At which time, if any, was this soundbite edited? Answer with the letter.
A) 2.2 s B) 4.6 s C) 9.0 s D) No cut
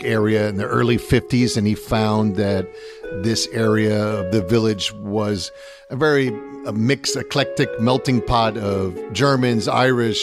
C